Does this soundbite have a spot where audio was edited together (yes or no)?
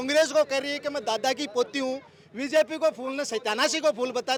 no